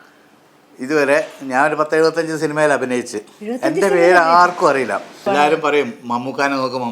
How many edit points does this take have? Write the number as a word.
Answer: one